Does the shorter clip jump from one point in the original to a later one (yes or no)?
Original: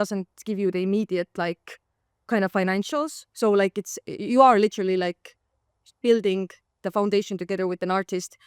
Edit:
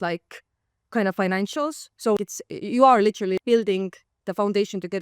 yes